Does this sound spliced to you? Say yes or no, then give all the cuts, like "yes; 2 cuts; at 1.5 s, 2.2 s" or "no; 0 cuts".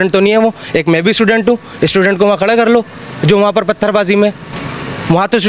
no; 0 cuts